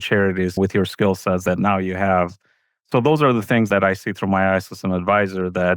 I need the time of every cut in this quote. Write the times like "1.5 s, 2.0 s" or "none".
1.4 s